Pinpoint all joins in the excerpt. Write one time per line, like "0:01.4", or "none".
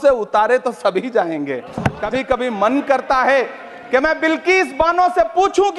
0:02.0